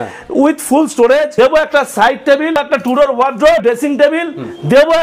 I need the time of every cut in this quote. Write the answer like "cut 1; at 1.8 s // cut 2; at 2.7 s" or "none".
cut 1; at 1.3 s // cut 2; at 2.6 s // cut 3; at 3.6 s

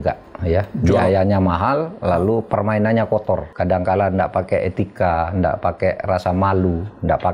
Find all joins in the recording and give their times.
cut 1; at 3.5 s

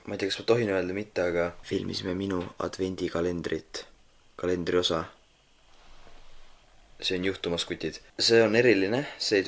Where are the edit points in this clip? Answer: cut 1; at 2.3 s

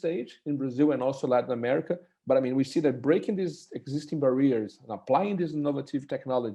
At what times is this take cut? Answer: none

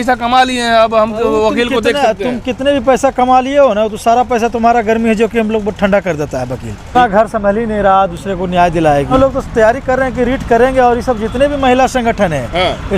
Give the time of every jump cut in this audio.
cut 1; at 6.9 s // cut 2; at 9.1 s

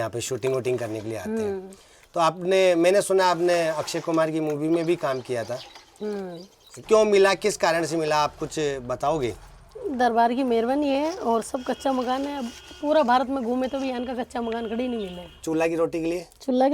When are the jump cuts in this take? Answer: cut 1; at 6.8 s // cut 2; at 15.4 s

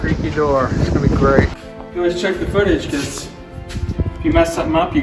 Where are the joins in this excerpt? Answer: cut 1; at 1.6 s

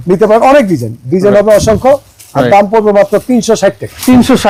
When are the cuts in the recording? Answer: none

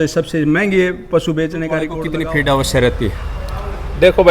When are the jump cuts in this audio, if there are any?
cut 1; at 2.0 s

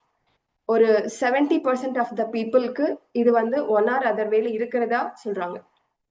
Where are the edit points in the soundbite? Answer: none

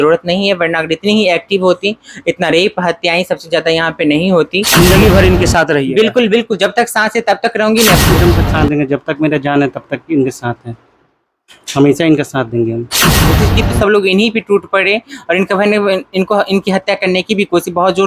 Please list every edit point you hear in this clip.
cut 1; at 4.7 s // cut 2; at 8.0 s // cut 3; at 13.4 s

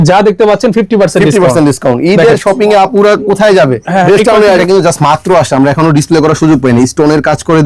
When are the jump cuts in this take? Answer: cut 1; at 4.6 s

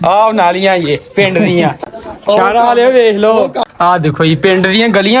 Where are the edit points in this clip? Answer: cut 1; at 1.8 s // cut 2; at 3.7 s

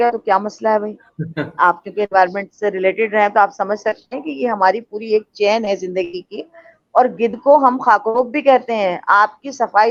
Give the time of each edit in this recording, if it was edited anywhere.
none

